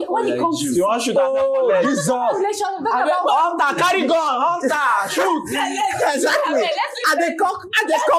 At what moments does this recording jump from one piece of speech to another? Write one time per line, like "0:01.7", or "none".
none